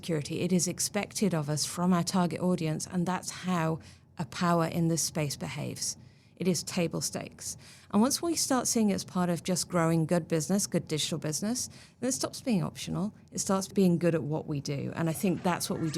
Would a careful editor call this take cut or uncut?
cut